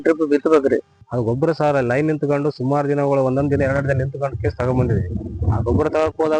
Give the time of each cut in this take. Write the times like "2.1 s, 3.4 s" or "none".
1.0 s